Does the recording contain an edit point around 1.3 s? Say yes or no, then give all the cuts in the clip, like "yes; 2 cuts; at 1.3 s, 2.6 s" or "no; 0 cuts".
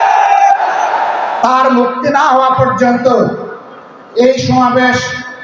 yes; 1 cut; at 1.3 s